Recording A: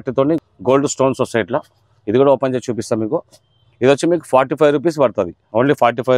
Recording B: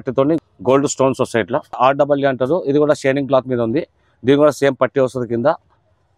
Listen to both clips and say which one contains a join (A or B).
B